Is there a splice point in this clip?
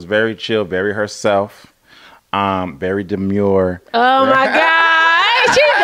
no; 0 cuts

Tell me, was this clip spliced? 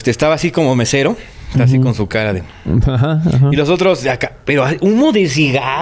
no; 0 cuts

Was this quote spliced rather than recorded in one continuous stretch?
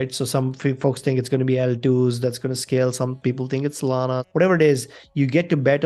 yes; 1 cut; at 4.2 s

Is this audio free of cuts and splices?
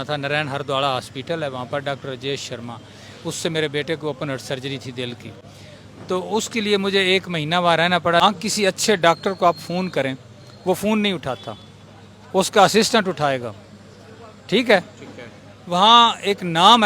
no; 1 cut; at 8.2 s

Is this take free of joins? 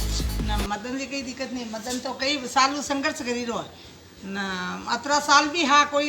yes; 0 cuts

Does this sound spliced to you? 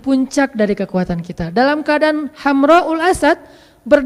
no; 0 cuts

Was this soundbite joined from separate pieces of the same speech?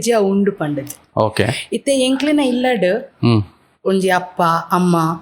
no; 0 cuts

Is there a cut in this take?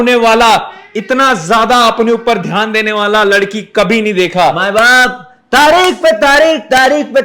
yes; 1 cut; at 4.6 s

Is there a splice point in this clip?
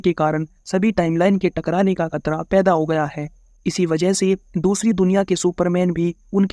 no; 0 cuts

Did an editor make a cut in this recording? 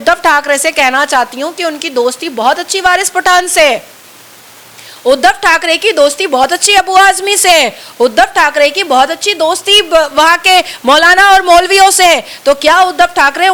no; 0 cuts

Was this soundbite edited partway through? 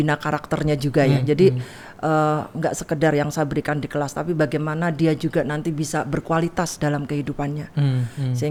no; 0 cuts

